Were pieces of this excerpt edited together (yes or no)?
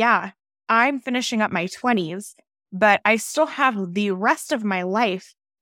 no